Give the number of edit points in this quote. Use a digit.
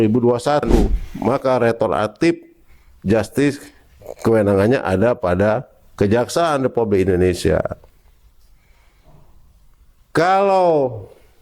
1